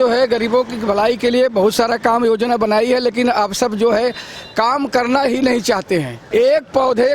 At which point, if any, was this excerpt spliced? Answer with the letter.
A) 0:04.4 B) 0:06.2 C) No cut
B